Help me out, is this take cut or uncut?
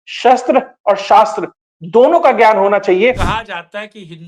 cut